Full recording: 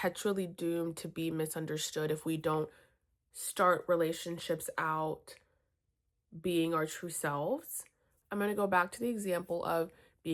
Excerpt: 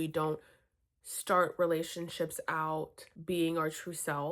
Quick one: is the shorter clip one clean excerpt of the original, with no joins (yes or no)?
no